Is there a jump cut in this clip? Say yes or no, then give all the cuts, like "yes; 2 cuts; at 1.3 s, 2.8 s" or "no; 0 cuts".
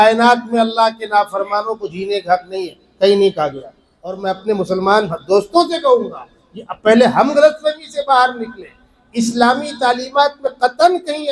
yes; 1 cut; at 4.2 s